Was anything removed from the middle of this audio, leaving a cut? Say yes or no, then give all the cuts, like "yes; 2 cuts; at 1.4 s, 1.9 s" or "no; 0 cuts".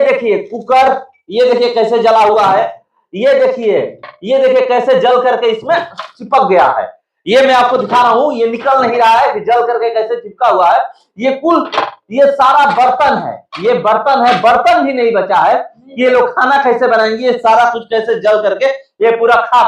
no; 0 cuts